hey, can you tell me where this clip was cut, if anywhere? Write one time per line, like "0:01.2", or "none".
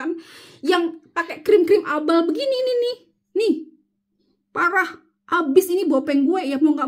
none